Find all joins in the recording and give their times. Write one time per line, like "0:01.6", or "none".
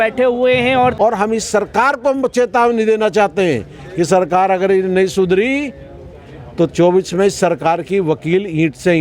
0:00.9